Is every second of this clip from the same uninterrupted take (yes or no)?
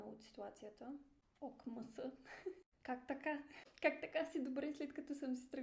no